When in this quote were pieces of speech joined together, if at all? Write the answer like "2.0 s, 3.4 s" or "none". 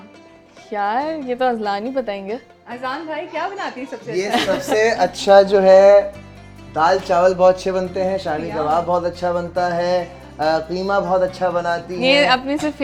none